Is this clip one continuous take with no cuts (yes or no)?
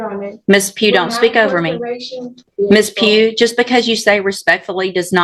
no